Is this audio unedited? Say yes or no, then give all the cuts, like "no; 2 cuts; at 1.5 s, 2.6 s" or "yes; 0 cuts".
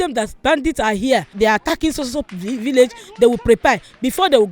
no; 1 cut; at 1.3 s